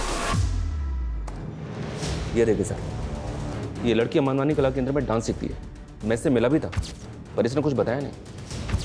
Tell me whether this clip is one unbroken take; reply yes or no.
no